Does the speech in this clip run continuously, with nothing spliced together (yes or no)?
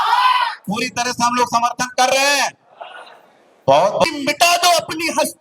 no